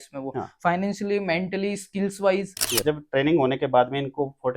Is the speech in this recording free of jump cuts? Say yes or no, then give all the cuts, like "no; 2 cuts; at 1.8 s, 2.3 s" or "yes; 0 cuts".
no; 1 cut; at 2.8 s